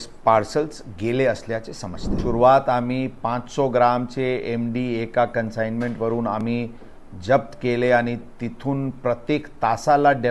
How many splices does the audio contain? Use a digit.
1